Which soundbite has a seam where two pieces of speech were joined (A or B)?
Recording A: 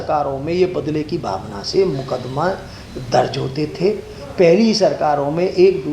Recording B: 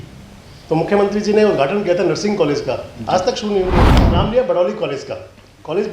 B